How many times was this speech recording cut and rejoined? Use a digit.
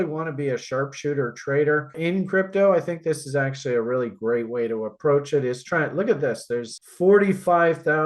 2